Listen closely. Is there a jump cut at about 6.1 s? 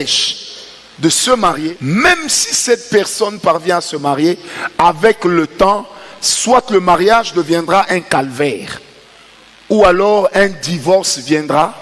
no; 1 cut; at 1.7 s

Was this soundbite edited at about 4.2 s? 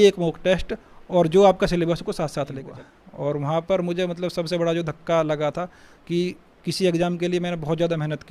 no; 1 cut; at 2.7 s

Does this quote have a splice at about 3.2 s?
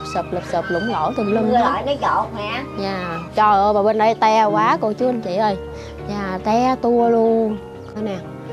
yes; 1 cut; at 3.2 s

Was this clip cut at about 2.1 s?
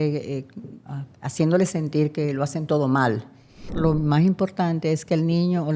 no; 1 cut; at 3.7 s

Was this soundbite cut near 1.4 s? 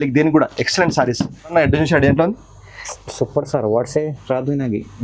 yes; 1 cut; at 1.4 s

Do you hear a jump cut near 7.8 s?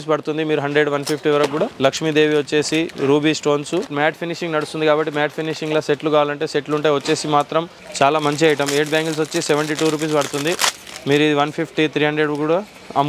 yes; 3 cuts; at 1.7 s, 3.9 s, 7.8 s

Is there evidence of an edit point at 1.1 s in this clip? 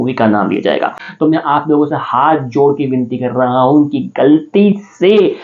yes; 1 cut; at 1.1 s

